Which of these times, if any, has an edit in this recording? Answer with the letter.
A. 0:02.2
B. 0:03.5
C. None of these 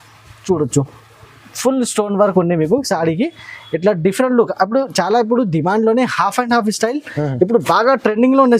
C